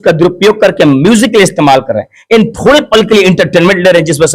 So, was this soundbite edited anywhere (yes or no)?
no